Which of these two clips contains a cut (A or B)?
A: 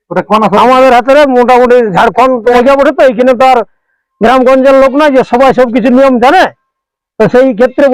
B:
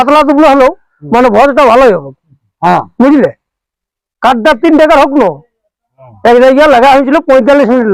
A